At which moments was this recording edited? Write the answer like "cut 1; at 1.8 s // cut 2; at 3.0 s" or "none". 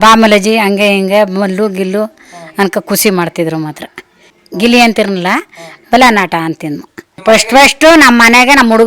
cut 1; at 4.2 s // cut 2; at 7.2 s